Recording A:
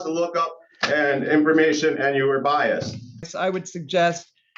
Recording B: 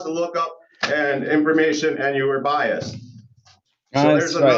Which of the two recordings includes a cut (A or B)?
A